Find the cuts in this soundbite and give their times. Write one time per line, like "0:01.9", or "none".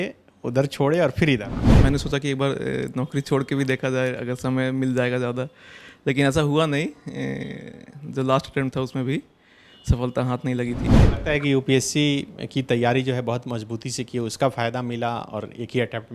0:01.6
0:11.0

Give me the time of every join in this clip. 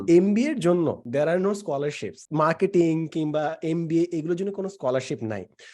0:01.0
0:02.2

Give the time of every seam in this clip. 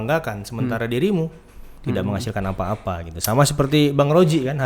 none

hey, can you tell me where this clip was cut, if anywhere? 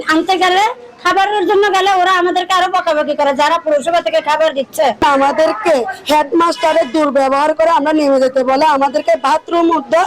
none

